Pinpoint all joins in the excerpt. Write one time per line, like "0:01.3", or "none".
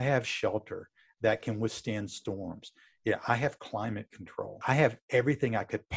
0:04.6